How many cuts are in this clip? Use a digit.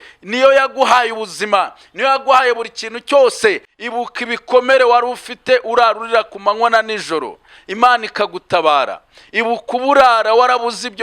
1